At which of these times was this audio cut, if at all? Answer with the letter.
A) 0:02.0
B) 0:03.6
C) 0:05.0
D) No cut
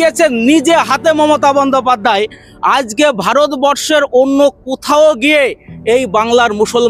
D